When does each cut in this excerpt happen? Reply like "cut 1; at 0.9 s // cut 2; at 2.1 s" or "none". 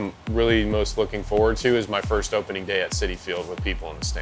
none

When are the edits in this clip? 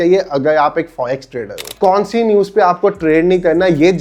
cut 1; at 1.7 s

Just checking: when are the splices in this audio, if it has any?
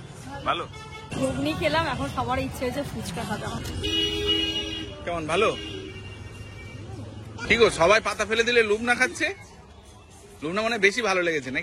cut 1; at 1.0 s // cut 2; at 3.6 s // cut 3; at 7.4 s

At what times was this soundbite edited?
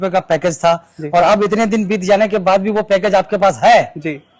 none

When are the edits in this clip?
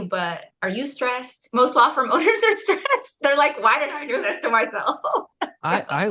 none

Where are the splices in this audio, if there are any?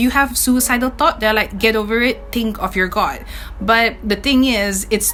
none

